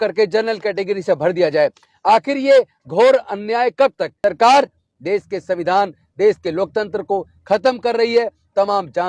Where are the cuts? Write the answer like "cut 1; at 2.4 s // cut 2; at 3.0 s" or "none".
cut 1; at 4.1 s